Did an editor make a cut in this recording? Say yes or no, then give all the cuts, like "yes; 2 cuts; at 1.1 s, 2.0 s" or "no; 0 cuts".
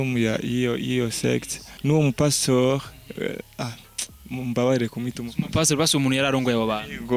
yes; 1 cut; at 1.7 s